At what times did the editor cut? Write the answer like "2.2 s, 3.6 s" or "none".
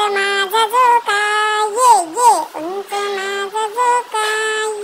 none